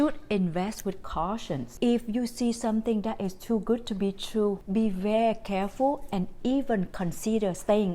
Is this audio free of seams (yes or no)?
no